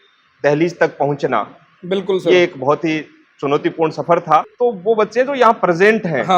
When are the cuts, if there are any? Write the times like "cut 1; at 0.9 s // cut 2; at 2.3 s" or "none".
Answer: cut 1; at 4.5 s